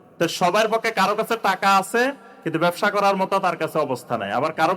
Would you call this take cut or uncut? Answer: uncut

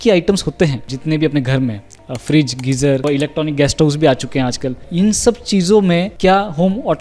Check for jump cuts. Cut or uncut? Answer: cut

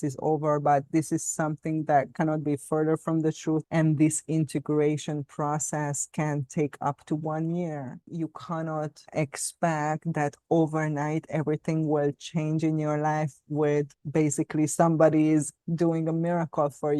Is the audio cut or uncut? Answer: cut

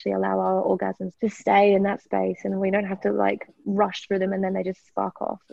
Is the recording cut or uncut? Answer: cut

